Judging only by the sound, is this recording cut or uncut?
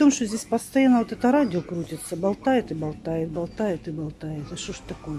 uncut